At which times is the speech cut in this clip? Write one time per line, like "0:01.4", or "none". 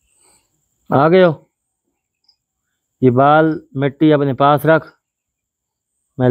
none